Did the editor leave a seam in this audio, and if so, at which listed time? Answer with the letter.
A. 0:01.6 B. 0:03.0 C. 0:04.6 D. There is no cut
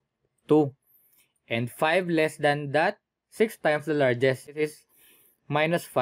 C